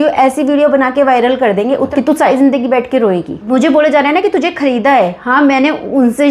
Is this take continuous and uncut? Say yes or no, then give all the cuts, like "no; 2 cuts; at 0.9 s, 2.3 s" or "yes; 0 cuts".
no; 2 cuts; at 1.9 s, 3.4 s